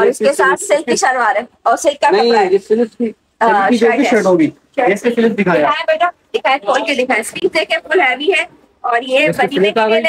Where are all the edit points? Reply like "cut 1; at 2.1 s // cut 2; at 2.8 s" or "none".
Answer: none